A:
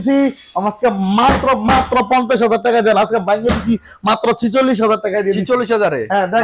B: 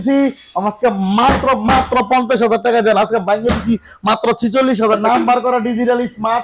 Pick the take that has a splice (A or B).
B